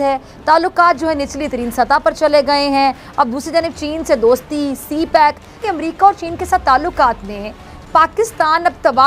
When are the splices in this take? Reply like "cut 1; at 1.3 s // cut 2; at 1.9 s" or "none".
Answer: cut 1; at 5.6 s

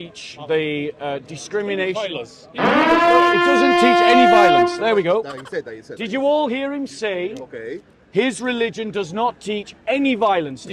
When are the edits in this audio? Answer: none

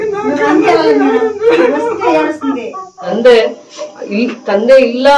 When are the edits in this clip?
cut 1; at 3.0 s

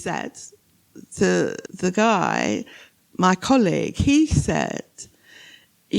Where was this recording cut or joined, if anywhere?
cut 1; at 1.7 s

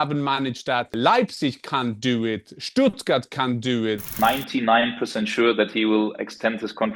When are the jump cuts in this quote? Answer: cut 1; at 0.9 s // cut 2; at 4.1 s

